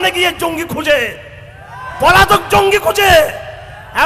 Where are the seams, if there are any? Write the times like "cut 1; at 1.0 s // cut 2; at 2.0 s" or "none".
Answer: none